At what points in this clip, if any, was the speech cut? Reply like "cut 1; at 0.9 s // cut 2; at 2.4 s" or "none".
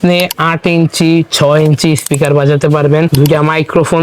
cut 1; at 3.1 s